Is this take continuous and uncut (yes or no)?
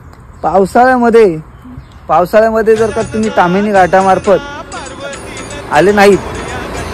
no